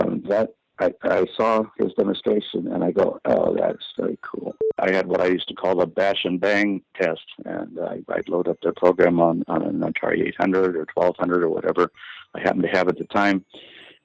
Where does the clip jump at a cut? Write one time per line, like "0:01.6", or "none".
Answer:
0:04.8